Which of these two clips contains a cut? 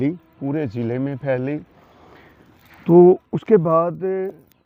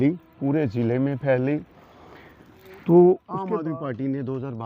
second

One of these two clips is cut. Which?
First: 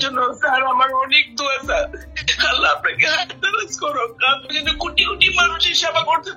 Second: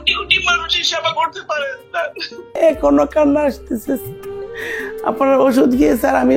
second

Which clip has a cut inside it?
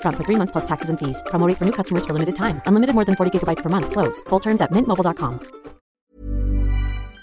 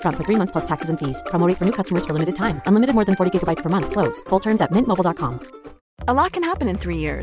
first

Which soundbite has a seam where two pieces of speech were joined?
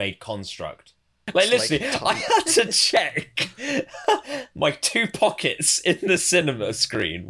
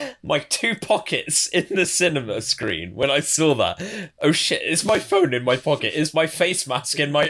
first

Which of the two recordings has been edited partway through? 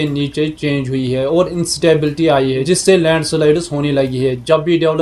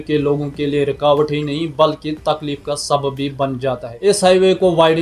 second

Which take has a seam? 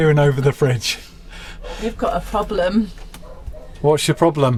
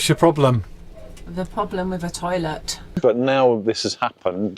second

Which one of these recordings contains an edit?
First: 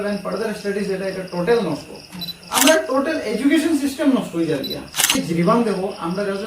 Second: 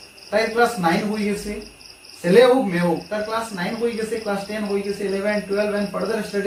first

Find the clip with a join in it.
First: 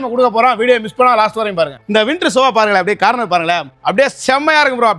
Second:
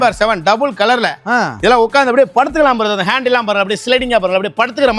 first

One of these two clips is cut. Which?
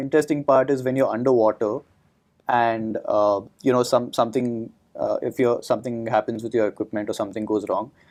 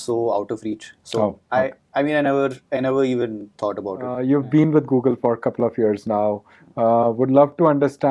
second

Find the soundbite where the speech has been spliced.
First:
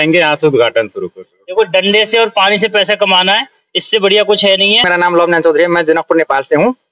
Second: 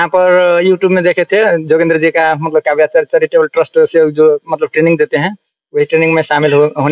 first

